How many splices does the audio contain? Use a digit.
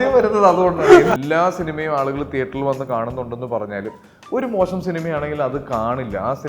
1